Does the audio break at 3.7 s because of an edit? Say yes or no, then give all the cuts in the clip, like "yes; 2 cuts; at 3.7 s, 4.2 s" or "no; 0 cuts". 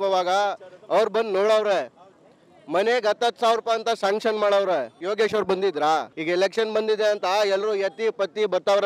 no; 2 cuts; at 4.9 s, 6.1 s